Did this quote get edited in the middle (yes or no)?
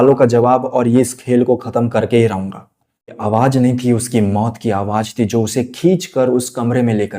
yes